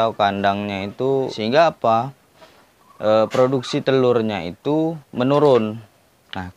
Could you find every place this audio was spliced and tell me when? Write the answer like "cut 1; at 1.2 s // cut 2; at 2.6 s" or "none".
cut 1; at 1.2 s